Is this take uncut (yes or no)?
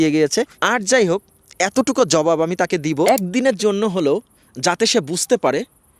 no